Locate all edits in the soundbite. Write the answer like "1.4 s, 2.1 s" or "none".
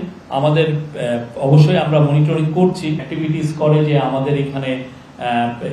3.0 s